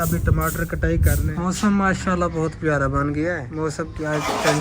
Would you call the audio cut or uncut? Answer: cut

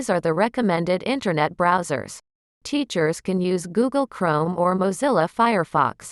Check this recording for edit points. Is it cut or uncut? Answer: uncut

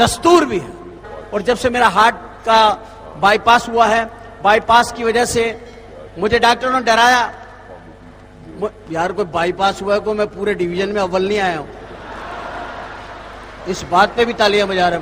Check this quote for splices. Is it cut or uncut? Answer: cut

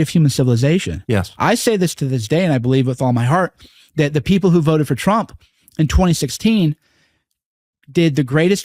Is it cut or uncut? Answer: uncut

